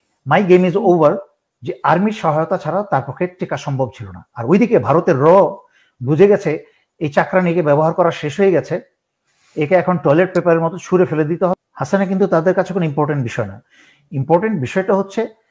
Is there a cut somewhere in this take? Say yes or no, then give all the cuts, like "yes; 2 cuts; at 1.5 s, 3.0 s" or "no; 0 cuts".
yes; 1 cut; at 11.6 s